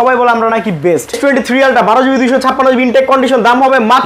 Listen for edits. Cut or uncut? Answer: cut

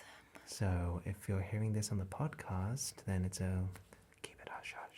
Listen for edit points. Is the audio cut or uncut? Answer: uncut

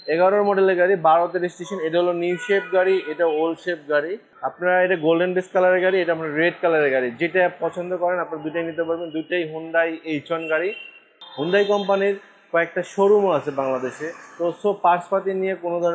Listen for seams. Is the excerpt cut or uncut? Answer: cut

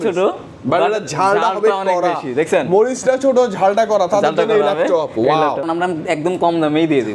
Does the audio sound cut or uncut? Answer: cut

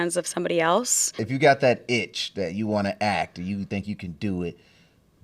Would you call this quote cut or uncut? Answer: cut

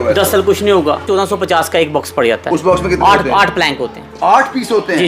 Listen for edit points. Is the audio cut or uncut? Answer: cut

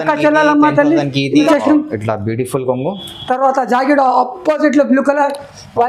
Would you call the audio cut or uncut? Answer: cut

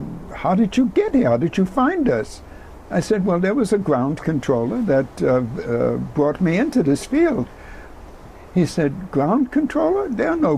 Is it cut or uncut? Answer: uncut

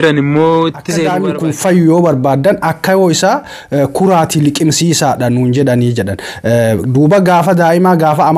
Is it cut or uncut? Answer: cut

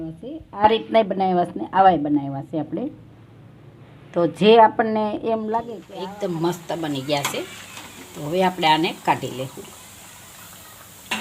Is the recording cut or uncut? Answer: cut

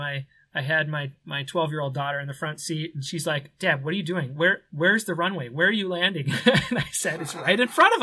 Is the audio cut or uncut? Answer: uncut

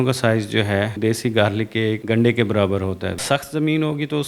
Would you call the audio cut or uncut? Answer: cut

